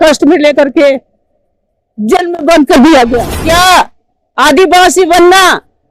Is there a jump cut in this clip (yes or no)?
yes